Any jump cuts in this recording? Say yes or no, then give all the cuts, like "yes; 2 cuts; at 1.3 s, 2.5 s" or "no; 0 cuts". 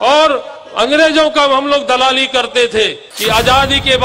yes; 1 cut; at 3.1 s